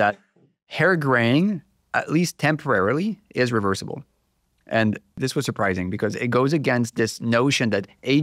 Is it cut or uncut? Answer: uncut